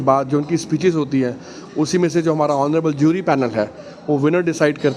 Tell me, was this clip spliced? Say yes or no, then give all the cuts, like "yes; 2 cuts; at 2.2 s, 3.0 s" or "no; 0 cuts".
no; 0 cuts